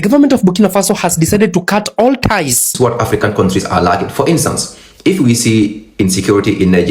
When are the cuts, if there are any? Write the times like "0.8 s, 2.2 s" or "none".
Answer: 2.7 s